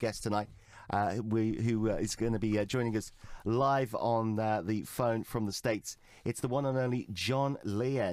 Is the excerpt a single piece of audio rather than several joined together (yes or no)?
no